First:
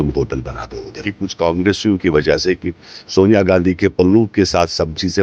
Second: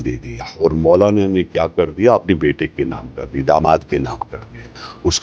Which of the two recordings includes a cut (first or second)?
first